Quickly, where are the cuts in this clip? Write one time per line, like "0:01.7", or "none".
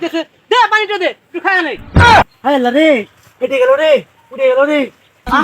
0:02.3